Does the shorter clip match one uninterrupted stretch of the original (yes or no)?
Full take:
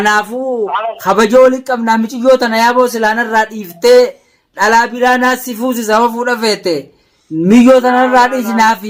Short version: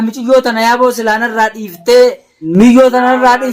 no